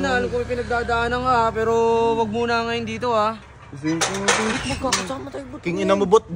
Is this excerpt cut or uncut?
uncut